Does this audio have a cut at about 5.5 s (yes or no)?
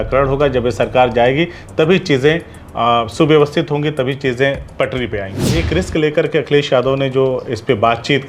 yes